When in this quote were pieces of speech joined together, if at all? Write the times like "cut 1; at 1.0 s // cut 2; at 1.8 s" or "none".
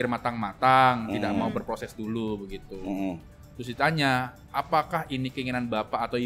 none